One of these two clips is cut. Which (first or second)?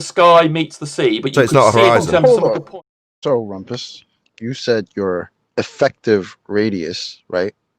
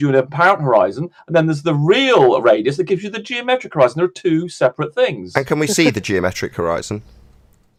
first